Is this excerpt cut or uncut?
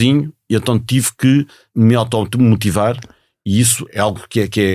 cut